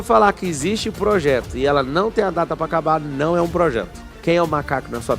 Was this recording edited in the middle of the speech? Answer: yes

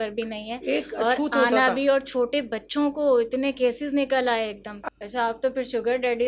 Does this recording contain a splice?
yes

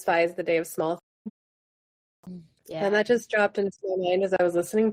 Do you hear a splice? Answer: no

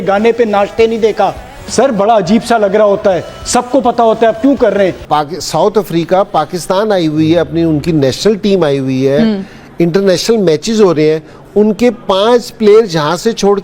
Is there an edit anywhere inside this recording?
no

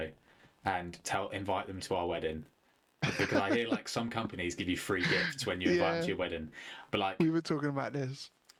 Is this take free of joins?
yes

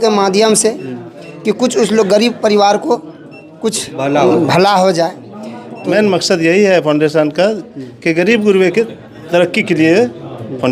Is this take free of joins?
no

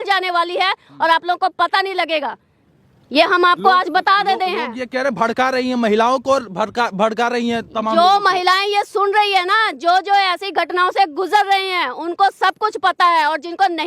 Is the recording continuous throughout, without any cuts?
yes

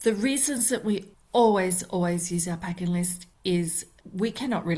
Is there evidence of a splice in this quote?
yes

